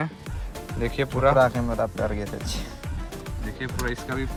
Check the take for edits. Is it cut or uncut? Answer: uncut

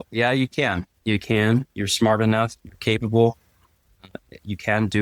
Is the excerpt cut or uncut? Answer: uncut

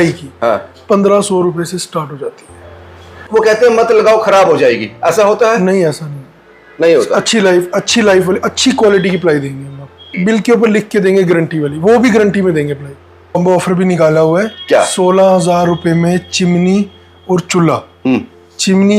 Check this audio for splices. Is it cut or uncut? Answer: cut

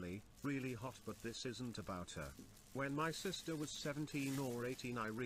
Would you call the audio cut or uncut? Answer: uncut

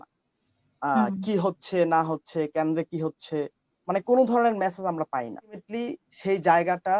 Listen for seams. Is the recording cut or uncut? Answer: cut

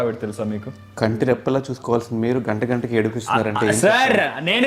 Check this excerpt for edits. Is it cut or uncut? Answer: uncut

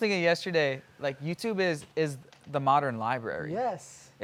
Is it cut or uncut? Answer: uncut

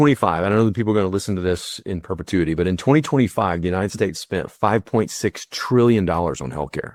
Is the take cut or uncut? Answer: uncut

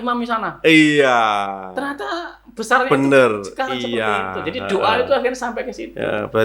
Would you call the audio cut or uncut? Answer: uncut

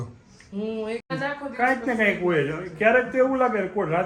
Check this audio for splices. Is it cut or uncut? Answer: cut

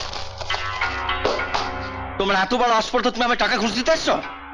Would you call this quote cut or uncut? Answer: cut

